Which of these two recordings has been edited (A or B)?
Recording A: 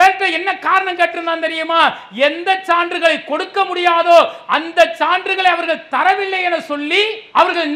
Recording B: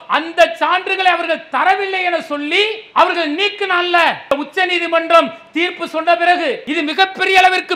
B